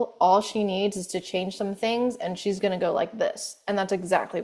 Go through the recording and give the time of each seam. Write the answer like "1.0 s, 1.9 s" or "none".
none